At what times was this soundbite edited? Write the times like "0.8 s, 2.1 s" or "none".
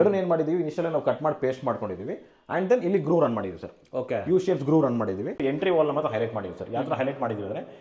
5.3 s